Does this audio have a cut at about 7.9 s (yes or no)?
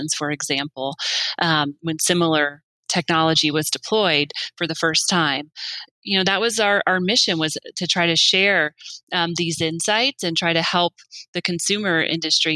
no